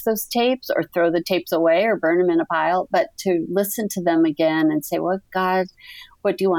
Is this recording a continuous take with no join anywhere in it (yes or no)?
yes